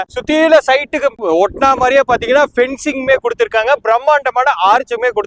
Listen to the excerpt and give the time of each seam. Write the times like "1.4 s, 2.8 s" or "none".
1.2 s